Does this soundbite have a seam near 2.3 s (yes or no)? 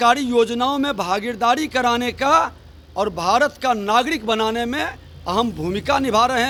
no